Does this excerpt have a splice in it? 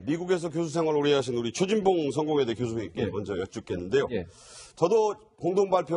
no; 0 cuts

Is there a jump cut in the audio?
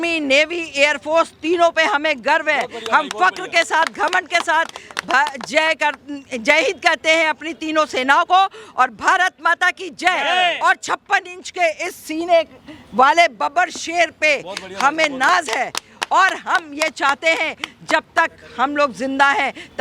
no; 0 cuts

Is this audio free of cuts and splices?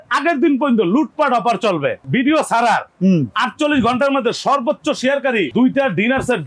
no; 1 cut; at 2.0 s

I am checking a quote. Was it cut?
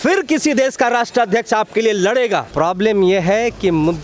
yes; 1 cut; at 2.5 s

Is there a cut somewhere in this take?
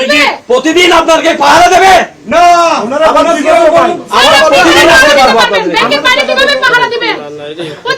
no; 0 cuts

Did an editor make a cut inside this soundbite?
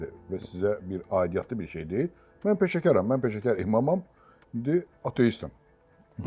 no; 0 cuts

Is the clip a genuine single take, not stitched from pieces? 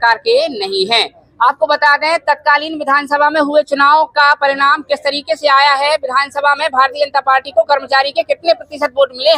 yes; 0 cuts

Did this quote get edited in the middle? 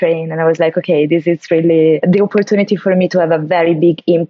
yes; 1 cut; at 2.0 s

